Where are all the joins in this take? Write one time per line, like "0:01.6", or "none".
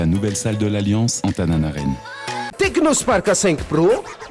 0:02.5